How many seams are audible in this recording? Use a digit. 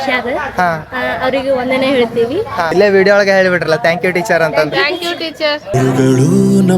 2